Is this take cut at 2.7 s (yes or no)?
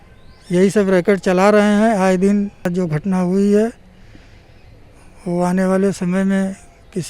yes